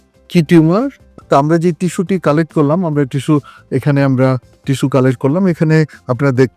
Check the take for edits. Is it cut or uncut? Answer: cut